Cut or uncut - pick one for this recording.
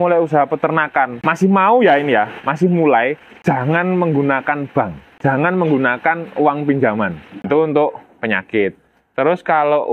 cut